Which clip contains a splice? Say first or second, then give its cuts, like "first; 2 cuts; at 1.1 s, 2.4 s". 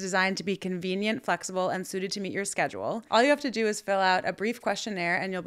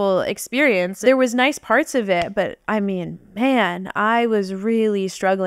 second; 1 cut; at 1.0 s